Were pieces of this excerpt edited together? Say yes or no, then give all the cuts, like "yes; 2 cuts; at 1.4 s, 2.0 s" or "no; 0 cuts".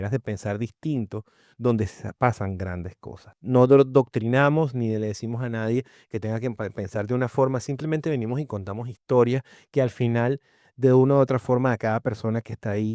yes; 1 cut; at 3.4 s